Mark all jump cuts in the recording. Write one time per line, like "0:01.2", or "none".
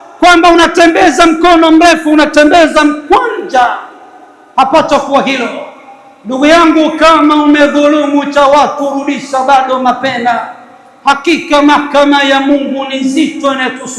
none